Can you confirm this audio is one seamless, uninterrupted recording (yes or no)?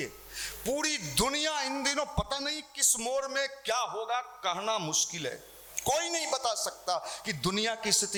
yes